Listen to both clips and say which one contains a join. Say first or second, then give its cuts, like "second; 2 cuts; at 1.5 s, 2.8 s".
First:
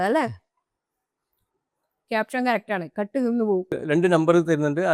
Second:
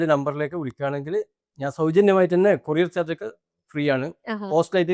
first; 1 cut; at 3.8 s